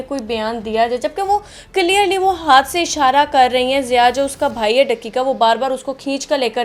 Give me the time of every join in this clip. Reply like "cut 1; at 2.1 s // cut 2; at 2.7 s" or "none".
none